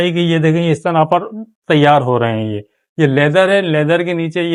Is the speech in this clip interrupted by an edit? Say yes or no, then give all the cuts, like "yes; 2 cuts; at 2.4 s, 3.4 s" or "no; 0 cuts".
no; 0 cuts